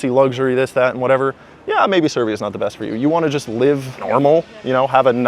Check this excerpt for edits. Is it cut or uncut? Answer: cut